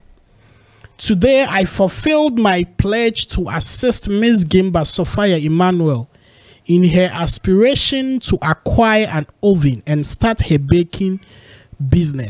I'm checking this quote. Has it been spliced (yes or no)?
no